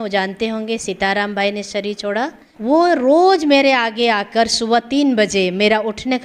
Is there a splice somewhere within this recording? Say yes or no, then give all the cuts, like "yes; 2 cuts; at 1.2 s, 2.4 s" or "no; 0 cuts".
yes; 1 cut; at 2.5 s